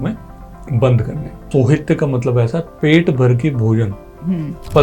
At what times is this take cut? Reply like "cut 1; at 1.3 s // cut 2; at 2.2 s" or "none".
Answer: cut 1; at 1.5 s